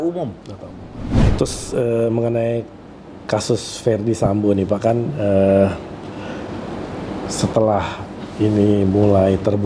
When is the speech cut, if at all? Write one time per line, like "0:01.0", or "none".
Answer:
0:01.3